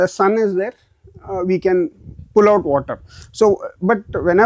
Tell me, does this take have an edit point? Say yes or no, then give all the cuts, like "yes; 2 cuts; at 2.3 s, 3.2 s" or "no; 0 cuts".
no; 0 cuts